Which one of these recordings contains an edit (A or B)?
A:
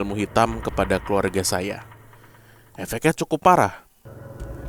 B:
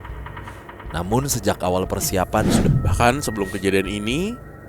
B